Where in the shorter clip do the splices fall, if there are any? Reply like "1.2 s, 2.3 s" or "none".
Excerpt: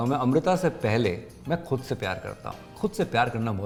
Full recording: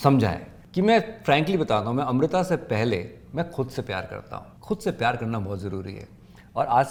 none